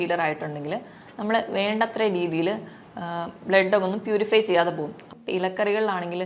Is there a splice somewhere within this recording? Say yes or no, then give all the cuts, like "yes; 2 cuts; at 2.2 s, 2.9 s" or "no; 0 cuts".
yes; 1 cut; at 5.1 s